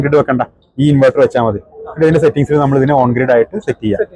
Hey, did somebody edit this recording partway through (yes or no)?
no